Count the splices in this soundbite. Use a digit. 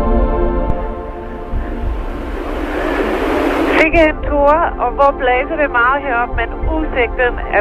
1